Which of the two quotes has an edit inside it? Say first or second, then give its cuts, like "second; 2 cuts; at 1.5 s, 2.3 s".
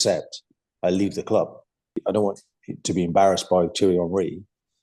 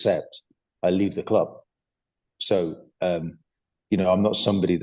first; 1 cut; at 2.0 s